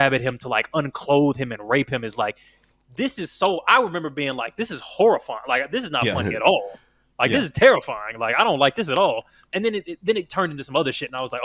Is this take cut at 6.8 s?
no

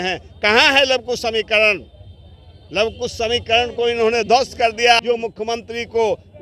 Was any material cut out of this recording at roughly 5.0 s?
yes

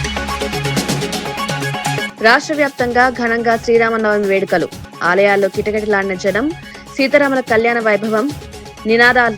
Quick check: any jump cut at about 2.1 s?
yes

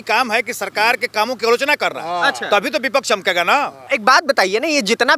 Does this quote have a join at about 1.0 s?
no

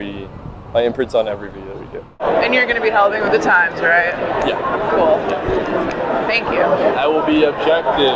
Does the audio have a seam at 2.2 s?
yes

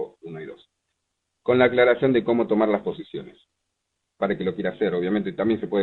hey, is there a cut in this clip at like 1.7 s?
yes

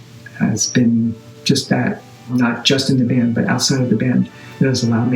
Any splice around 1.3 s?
yes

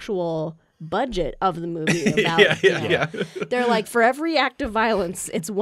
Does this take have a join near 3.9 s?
yes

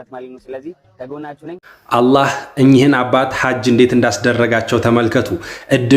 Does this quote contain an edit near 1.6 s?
yes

